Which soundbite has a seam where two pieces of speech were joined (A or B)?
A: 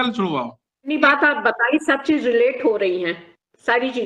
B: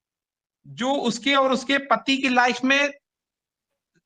A